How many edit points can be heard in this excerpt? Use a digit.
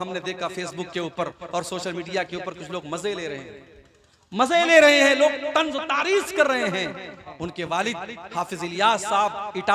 1